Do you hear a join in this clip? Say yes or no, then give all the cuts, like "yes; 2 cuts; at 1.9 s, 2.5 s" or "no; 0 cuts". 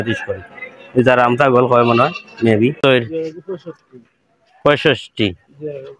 yes; 1 cut; at 2.8 s